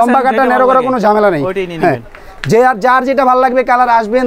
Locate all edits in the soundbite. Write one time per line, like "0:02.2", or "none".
none